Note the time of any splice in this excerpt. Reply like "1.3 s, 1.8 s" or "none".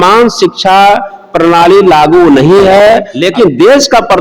3.2 s